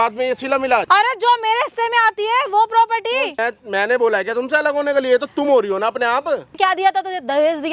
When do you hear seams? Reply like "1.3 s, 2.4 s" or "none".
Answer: 0.8 s, 3.4 s, 6.5 s